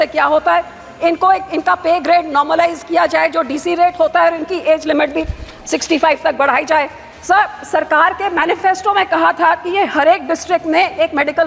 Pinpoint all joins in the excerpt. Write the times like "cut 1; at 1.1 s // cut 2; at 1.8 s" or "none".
none